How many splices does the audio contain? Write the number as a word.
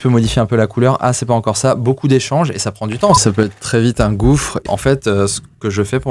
two